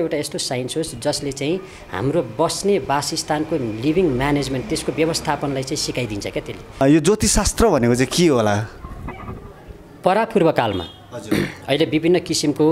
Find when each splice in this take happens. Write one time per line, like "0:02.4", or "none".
0:06.8